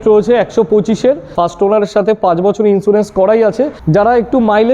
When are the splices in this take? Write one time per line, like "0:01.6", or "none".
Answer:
0:01.3
0:03.8